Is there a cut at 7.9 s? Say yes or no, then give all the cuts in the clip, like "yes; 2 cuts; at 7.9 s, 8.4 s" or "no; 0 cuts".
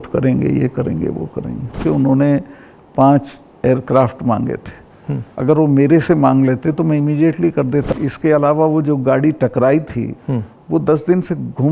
yes; 2 cuts; at 1.8 s, 7.9 s